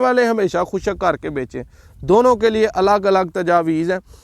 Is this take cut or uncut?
uncut